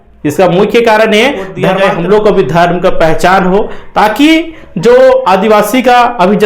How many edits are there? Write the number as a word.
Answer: one